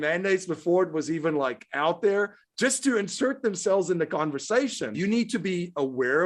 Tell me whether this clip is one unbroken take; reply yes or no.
no